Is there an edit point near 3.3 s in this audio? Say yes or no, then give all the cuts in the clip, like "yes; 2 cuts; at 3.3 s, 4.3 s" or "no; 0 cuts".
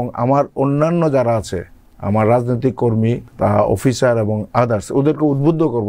yes; 1 cut; at 3.3 s